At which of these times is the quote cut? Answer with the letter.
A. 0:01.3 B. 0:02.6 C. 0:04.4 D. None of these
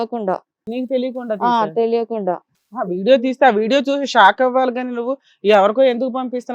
B